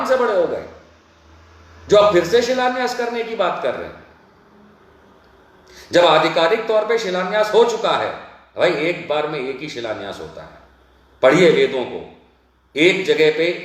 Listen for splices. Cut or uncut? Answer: uncut